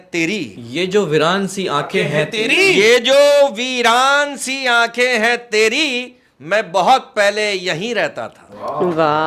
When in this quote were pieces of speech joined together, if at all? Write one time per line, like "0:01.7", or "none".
none